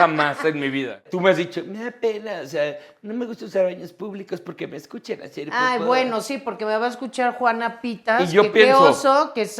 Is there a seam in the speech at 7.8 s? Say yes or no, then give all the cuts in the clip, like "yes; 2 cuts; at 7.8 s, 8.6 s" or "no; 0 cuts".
no; 1 cut; at 1.0 s